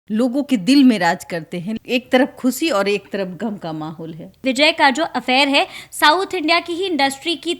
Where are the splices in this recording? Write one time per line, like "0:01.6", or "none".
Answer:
0:01.7
0:04.4